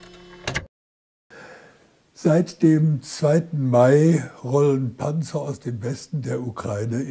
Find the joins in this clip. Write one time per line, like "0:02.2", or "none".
none